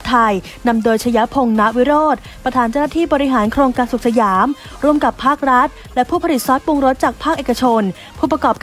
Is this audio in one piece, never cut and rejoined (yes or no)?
yes